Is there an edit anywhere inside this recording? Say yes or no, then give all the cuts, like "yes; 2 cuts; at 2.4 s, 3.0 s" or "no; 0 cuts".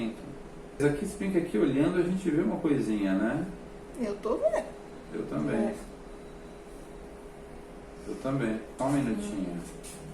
yes; 2 cuts; at 0.8 s, 8.7 s